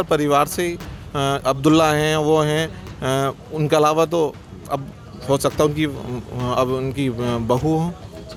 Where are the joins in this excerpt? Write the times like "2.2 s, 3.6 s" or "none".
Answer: none

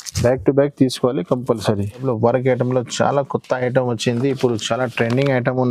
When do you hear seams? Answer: 2.0 s

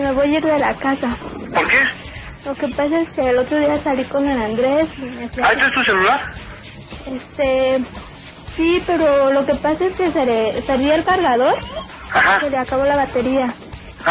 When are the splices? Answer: 3.1 s

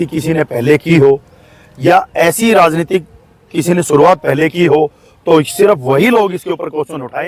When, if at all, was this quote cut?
none

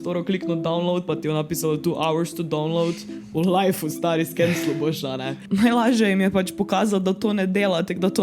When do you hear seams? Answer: 5.4 s

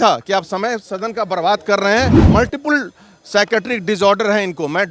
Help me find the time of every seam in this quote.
2.2 s

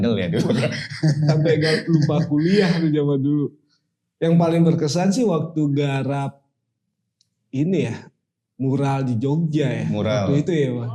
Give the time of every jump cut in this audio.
none

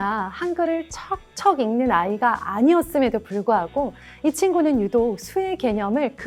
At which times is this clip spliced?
none

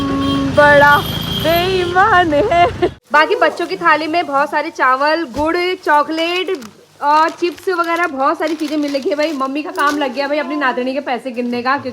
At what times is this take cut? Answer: 3.0 s

